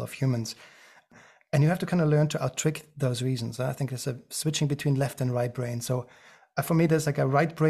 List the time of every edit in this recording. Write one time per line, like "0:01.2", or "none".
0:01.0